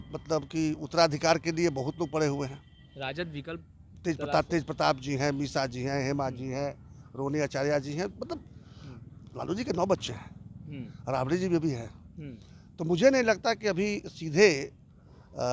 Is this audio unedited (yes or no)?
yes